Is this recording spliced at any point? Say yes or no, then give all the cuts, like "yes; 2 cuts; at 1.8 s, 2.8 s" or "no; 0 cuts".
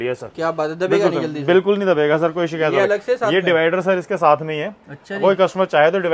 no; 0 cuts